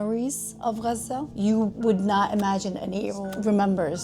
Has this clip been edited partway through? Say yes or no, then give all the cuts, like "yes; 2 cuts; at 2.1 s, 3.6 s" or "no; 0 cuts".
yes; 2 cuts; at 1.4 s, 3.2 s